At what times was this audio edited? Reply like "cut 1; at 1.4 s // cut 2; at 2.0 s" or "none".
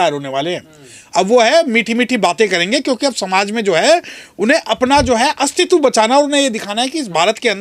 none

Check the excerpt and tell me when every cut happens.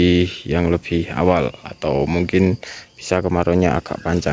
none

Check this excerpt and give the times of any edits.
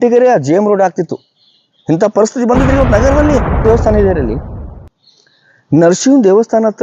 cut 1; at 3.6 s

